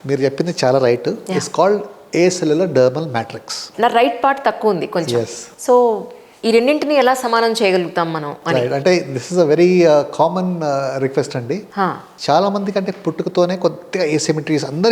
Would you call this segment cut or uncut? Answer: cut